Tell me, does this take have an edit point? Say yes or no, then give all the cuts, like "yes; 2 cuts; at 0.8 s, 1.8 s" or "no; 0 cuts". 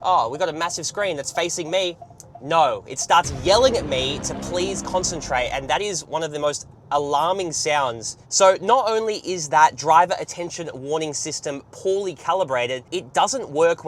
no; 0 cuts